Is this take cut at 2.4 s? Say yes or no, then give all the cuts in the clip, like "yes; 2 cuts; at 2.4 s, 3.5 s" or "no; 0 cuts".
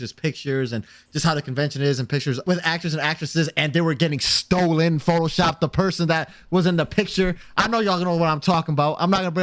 yes; 1 cut; at 2.4 s